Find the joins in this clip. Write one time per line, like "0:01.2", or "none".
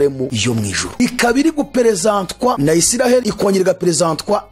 none